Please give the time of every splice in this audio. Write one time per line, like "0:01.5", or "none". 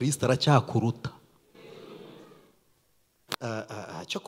0:03.4